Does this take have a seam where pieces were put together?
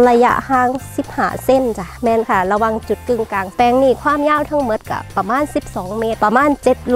yes; 3 cuts; at 1.9 s, 3.5 s, 6.2 s

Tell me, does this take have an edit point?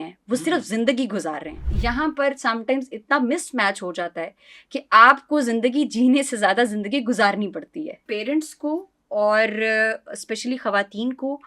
yes; 2 cuts; at 1.7 s, 8.0 s

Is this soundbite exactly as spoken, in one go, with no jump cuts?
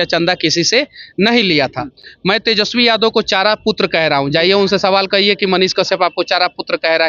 yes; 0 cuts

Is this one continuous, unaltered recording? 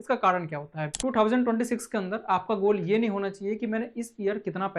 no; 1 cut; at 1.0 s

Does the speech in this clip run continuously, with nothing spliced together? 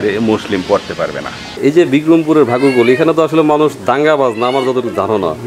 no; 1 cut; at 1.5 s

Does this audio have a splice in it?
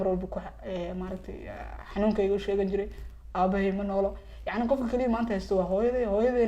no; 0 cuts

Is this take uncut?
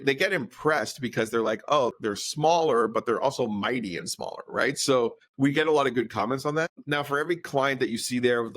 no; 3 cuts; at 1.9 s, 5.2 s, 6.8 s

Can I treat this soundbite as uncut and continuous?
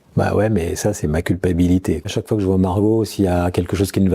no; 1 cut; at 2.1 s

